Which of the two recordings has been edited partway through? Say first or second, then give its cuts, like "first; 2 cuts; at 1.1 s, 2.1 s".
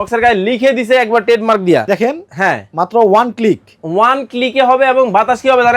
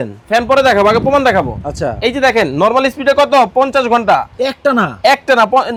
first; 1 cut; at 1.9 s